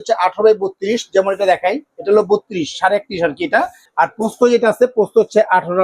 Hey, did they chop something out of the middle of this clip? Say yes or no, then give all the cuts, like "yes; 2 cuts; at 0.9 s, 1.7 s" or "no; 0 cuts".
yes; 1 cut; at 3.8 s